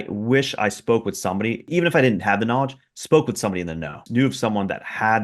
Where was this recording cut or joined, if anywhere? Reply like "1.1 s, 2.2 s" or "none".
1.7 s, 4.0 s